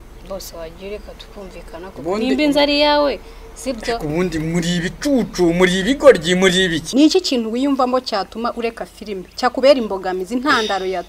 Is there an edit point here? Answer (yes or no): yes